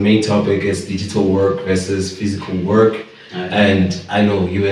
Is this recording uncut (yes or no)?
yes